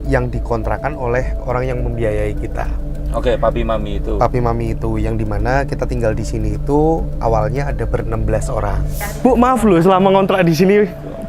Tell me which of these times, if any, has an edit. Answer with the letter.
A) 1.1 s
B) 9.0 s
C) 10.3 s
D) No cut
B